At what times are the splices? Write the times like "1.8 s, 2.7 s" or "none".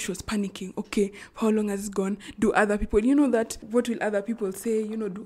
none